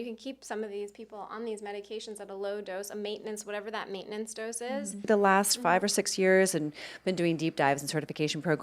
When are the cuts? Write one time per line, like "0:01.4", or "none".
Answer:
0:05.1